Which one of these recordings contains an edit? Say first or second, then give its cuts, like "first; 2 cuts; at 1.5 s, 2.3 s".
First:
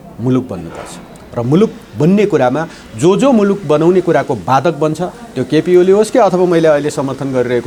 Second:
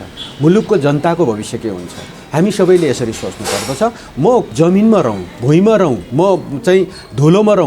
second; 2 cuts; at 4.5 s, 6.0 s